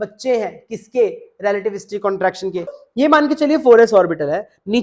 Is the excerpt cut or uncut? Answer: cut